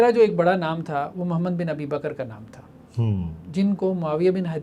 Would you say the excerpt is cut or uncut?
uncut